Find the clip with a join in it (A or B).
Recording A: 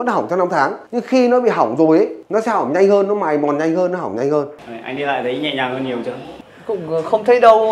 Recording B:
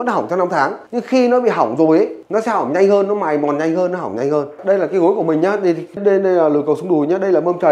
A